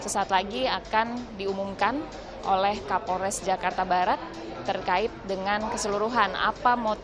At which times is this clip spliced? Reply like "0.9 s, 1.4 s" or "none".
none